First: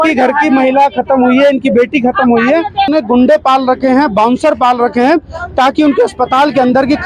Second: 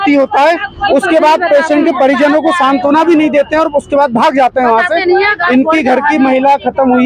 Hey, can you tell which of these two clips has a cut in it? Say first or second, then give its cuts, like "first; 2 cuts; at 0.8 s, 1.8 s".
first; 1 cut; at 2.9 s